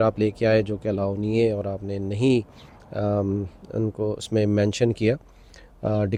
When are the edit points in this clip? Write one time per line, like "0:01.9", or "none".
none